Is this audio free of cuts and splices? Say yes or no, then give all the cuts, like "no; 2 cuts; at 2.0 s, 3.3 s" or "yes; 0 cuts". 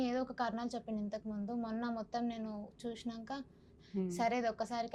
no; 1 cut; at 3.7 s